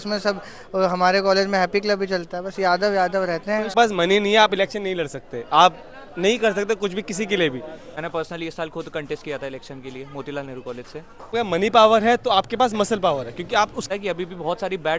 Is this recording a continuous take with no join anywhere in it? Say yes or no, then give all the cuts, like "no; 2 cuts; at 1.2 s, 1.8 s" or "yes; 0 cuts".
no; 4 cuts; at 3.7 s, 7.9 s, 11.3 s, 13.9 s